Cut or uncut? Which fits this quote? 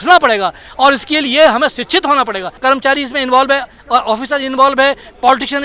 cut